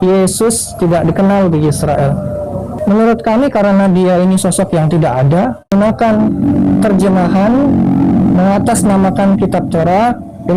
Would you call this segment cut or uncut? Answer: cut